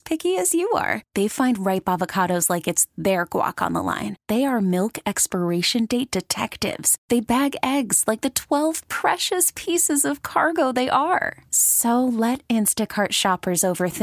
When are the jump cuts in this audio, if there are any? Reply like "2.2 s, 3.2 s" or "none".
none